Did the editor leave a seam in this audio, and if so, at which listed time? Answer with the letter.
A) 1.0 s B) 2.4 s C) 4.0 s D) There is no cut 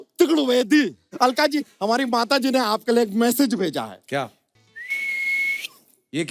A